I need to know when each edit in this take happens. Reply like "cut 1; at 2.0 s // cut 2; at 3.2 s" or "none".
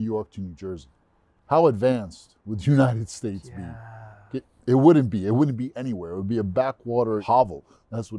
none